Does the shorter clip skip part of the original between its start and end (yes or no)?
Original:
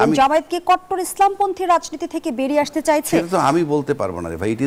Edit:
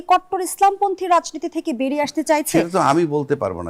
no